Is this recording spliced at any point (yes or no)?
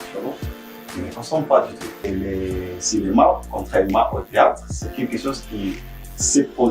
yes